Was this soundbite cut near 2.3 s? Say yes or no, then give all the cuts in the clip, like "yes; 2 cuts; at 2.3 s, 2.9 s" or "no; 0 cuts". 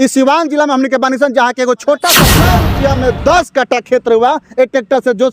yes; 1 cut; at 2.3 s